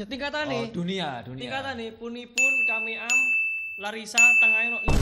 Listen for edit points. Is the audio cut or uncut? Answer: uncut